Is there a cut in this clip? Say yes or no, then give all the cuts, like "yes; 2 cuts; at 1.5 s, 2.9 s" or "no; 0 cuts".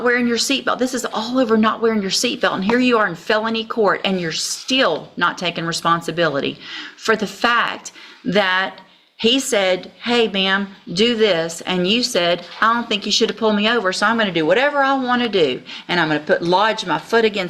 no; 0 cuts